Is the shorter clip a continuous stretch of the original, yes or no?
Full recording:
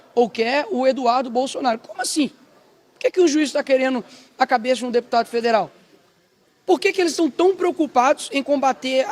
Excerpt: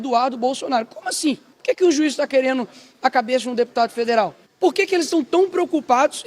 no